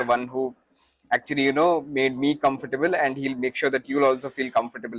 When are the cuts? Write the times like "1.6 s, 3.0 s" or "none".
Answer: none